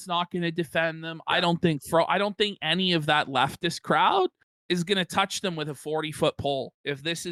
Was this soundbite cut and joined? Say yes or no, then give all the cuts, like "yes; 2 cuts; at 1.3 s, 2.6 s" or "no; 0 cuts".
no; 0 cuts